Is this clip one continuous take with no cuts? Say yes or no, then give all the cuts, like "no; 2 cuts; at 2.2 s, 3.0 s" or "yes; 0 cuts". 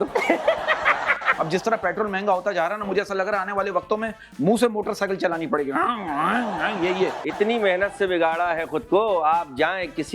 no; 2 cuts; at 1.3 s, 7.2 s